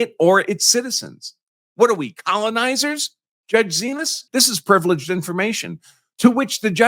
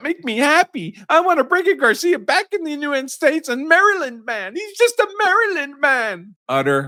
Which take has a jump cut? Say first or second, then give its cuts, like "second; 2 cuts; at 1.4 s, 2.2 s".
first; 1 cut; at 4.1 s